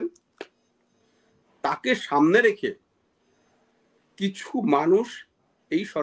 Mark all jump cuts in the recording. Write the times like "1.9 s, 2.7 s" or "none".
none